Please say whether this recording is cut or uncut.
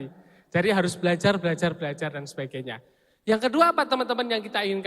uncut